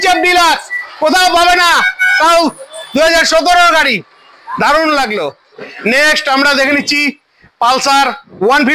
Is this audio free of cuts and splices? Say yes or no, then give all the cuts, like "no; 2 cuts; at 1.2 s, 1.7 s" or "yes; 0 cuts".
yes; 0 cuts